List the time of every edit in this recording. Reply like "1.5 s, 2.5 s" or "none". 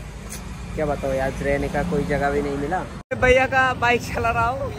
3.2 s